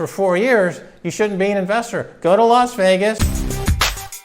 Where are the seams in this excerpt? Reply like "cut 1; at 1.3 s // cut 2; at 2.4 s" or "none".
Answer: cut 1; at 3.3 s